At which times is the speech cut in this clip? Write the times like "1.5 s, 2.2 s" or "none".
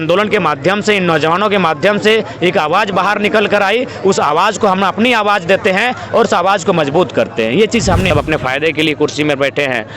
8.1 s